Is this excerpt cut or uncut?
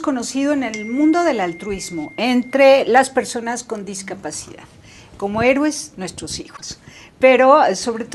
cut